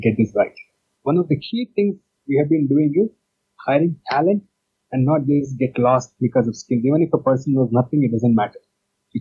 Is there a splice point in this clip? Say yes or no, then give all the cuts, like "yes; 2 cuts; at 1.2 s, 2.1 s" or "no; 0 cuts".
yes; 1 cut; at 0.9 s